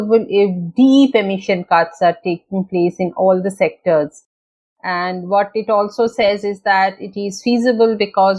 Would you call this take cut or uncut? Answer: uncut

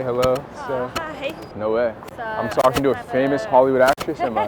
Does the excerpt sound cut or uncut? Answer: cut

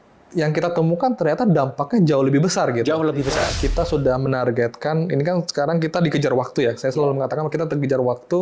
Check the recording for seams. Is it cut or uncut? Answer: cut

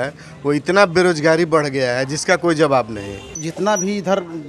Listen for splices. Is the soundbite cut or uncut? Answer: cut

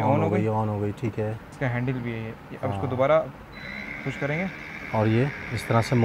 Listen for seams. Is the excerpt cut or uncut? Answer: uncut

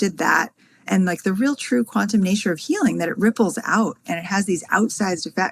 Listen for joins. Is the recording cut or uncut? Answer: uncut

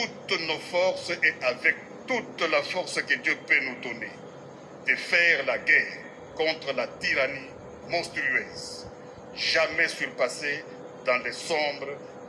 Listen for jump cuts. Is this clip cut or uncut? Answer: uncut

